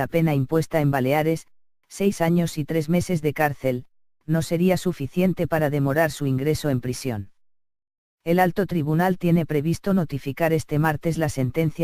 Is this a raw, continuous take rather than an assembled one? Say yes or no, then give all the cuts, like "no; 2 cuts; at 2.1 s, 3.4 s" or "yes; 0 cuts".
no; 1 cut; at 10.2 s